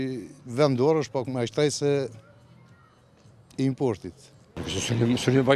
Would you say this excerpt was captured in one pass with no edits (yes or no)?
no